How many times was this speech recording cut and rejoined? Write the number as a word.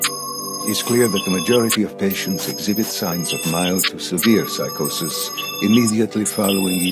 zero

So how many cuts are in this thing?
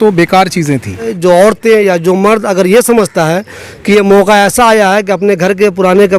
one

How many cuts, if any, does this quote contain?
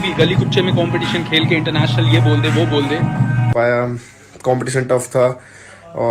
one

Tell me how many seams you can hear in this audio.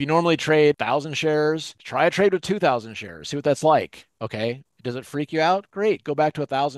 two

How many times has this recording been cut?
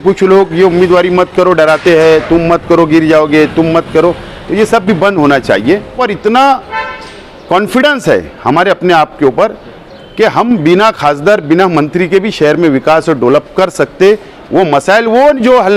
one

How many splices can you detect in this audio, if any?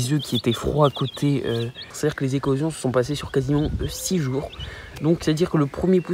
one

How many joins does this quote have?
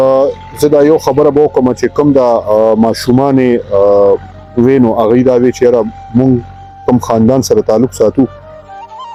zero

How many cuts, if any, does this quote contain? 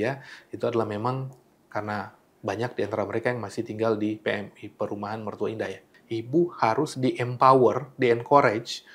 two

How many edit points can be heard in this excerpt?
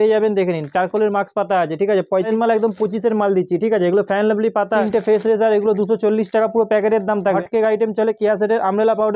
three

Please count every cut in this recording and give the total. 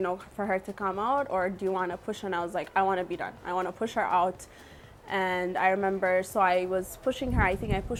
zero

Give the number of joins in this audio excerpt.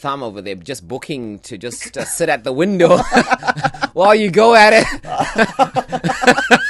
zero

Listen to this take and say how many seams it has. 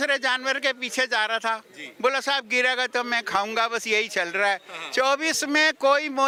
zero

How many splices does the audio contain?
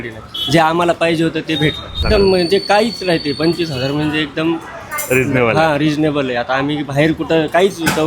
one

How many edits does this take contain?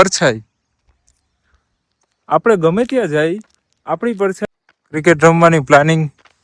one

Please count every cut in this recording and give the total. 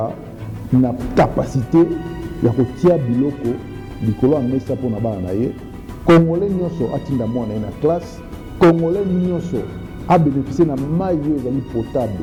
zero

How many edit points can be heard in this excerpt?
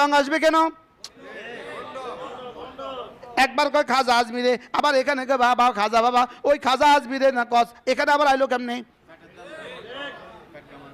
zero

